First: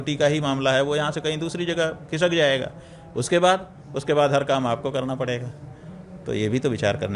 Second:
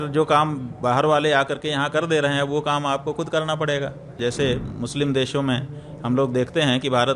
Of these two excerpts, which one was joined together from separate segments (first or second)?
second